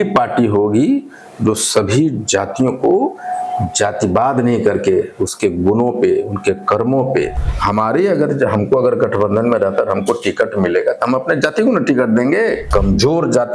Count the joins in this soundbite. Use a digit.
2